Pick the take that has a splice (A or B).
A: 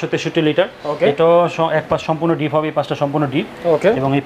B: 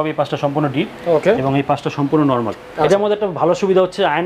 B